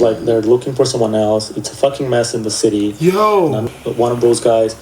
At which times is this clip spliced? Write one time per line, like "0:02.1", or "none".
0:03.7